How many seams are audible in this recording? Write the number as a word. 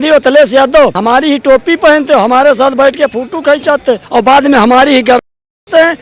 two